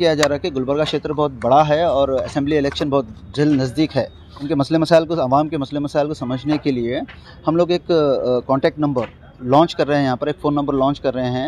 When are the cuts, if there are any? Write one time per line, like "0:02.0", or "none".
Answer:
0:04.4